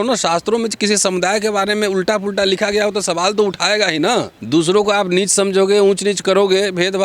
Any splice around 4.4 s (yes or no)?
yes